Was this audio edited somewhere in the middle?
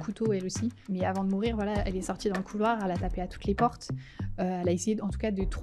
no; 0 cuts

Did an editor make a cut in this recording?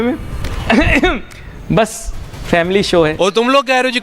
yes; 1 cut; at 3.1 s

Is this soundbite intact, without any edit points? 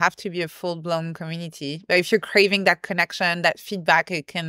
yes; 0 cuts

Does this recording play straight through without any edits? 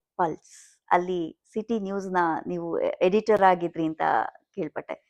yes; 0 cuts

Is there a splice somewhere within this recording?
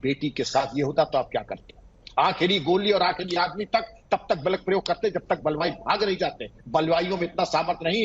no; 0 cuts

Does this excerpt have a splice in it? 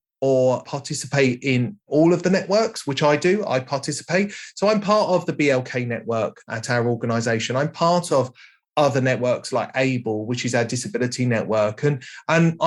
no; 0 cuts

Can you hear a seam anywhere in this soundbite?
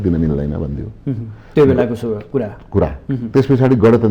no; 0 cuts

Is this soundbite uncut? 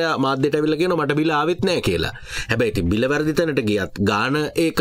yes; 0 cuts

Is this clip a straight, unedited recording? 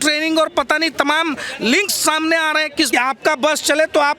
no; 1 cut; at 2.9 s

